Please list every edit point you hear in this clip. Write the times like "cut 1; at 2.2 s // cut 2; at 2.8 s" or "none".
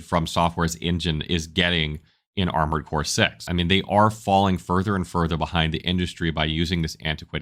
cut 1; at 3.4 s